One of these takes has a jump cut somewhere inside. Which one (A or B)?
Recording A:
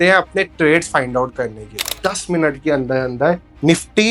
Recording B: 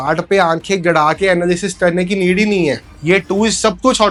A